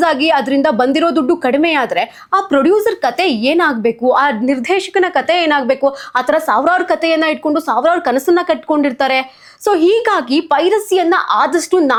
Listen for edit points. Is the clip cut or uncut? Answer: uncut